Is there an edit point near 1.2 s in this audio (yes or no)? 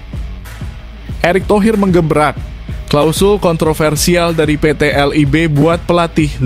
yes